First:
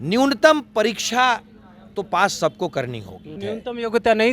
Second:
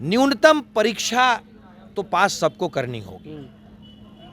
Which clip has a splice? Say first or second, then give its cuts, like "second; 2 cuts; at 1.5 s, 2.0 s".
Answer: first; 1 cut; at 3.4 s